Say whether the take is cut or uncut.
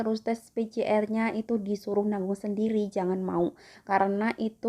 uncut